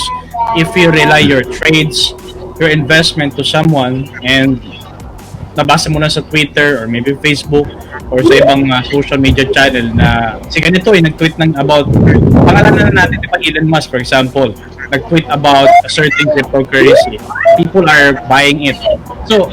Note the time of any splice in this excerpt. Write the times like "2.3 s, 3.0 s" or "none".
none